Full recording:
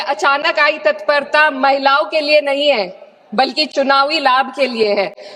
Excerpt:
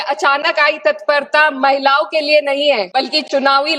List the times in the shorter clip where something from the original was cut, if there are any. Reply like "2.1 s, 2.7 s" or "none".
2.9 s